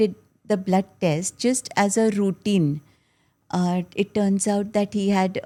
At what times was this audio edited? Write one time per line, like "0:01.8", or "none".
none